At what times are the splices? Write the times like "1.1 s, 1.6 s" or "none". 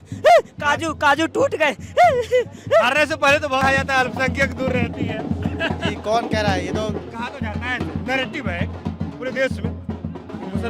3.6 s